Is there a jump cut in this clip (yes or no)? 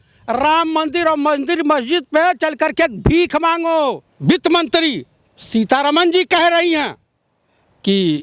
yes